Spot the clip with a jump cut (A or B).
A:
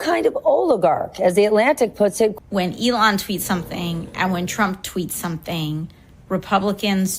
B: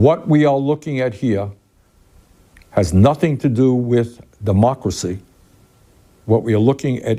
A